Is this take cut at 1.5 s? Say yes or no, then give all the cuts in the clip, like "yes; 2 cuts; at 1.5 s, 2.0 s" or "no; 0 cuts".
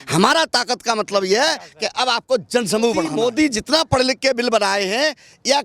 no; 1 cut; at 3.1 s